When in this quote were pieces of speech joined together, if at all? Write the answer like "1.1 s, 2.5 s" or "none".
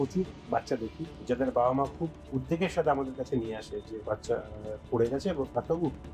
none